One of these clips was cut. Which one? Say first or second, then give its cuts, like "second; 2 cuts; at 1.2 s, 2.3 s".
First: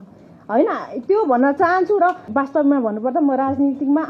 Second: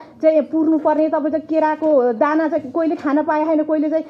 first; 1 cut; at 2.2 s